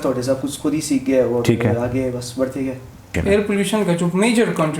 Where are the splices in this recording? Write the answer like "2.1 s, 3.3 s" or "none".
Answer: 3.2 s